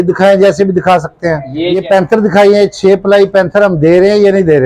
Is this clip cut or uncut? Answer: cut